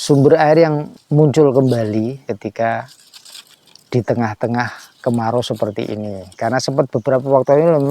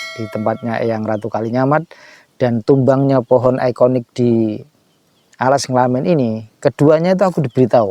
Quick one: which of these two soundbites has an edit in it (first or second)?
first